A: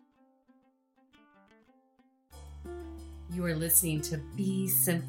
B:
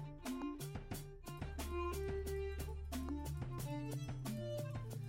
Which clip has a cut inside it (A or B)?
A